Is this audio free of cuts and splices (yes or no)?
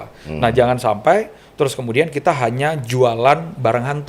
yes